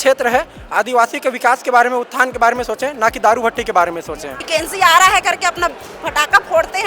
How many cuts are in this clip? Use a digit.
1